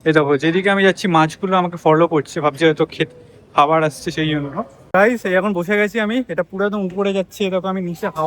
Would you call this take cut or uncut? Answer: cut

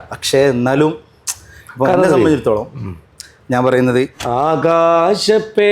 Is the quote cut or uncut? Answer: cut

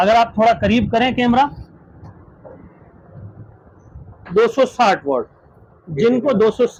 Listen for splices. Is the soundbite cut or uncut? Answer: uncut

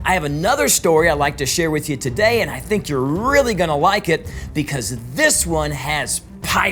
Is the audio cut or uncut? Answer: uncut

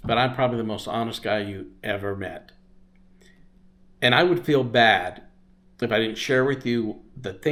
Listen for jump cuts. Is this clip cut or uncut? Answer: uncut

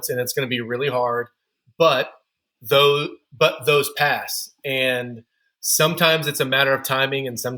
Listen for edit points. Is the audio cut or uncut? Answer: uncut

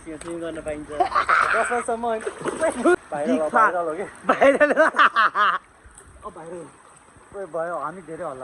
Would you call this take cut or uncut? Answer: cut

